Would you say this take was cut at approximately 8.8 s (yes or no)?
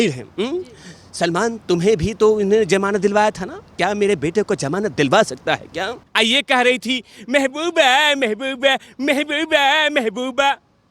no